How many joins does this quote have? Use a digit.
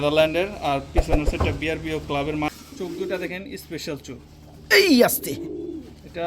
1